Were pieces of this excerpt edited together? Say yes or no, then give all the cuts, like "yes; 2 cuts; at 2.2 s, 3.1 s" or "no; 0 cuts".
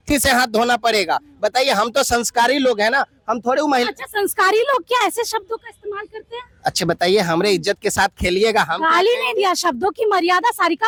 no; 0 cuts